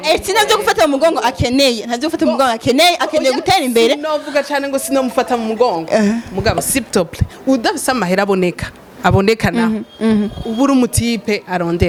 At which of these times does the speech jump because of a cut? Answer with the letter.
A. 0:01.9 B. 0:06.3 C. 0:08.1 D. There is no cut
D